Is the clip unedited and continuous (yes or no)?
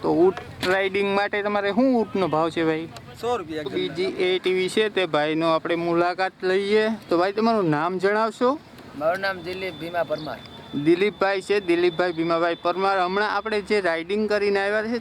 no